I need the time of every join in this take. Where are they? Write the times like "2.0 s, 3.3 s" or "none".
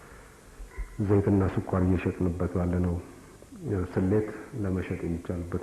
none